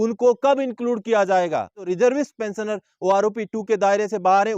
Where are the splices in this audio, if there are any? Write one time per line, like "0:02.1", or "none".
0:01.9